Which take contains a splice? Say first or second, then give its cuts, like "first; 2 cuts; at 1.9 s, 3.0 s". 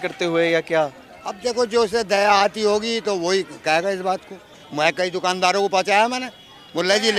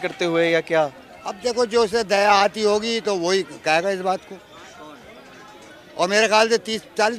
first; 1 cut; at 4.6 s